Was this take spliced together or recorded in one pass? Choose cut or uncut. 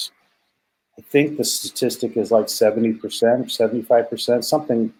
uncut